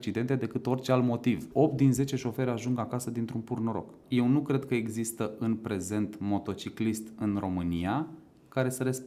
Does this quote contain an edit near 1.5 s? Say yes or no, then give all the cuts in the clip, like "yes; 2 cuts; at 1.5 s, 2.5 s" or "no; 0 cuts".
yes; 2 cuts; at 1.5 s, 4.0 s